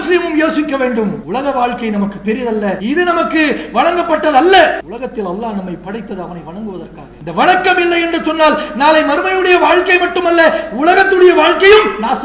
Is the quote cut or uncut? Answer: cut